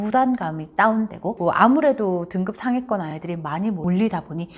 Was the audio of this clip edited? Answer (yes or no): yes